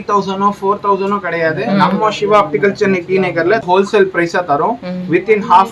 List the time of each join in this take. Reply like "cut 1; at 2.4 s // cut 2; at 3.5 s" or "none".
cut 1; at 3.7 s